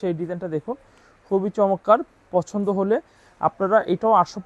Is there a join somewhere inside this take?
no; 0 cuts

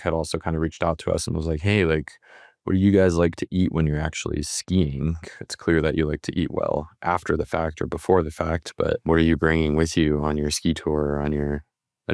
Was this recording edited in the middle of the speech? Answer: yes; 2 cuts; at 5.2 s, 9.0 s

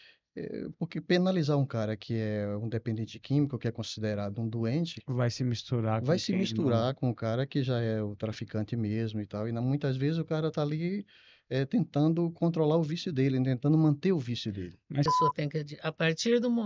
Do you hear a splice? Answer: yes; 1 cut; at 15.1 s

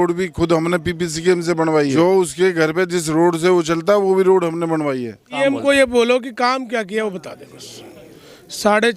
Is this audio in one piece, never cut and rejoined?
no; 2 cuts; at 2.0 s, 5.3 s

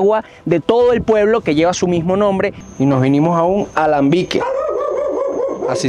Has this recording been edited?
yes; 1 cut; at 2.6 s

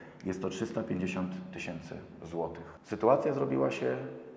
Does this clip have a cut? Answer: yes; 1 cut; at 2.7 s

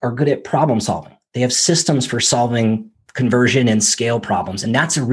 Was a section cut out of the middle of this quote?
no; 0 cuts

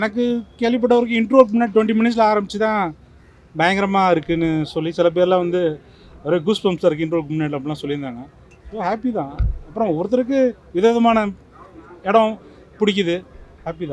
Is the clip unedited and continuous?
yes; 0 cuts

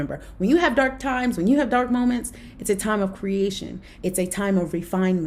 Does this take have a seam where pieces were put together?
no; 0 cuts

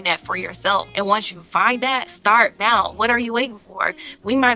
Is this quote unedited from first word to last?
no; 3 cuts; at 0.9 s, 2.1 s, 2.9 s

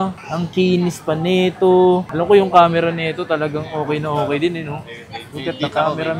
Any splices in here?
no; 0 cuts

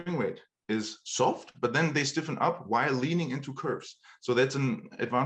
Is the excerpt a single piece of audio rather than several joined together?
yes; 0 cuts

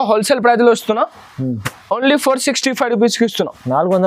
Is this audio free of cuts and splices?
yes; 0 cuts

